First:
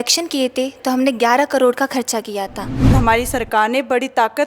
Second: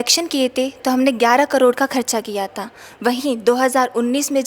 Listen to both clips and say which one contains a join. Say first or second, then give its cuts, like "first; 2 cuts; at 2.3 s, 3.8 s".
first; 1 cut; at 2.9 s